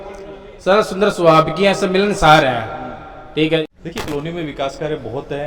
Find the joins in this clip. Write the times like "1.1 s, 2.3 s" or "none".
3.6 s